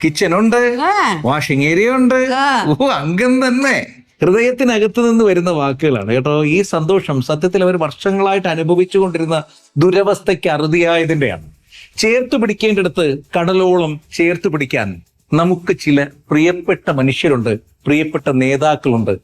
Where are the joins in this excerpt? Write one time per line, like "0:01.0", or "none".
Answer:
none